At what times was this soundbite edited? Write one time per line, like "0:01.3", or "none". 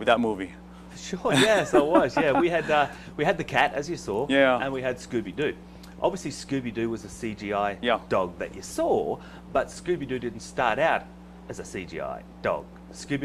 0:09.7